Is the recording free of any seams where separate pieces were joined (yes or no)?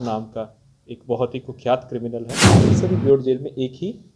no